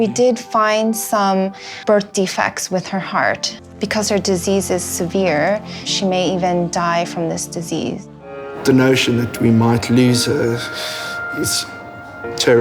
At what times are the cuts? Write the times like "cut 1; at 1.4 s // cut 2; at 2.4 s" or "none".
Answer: cut 1; at 3.6 s // cut 2; at 5.9 s // cut 3; at 8.4 s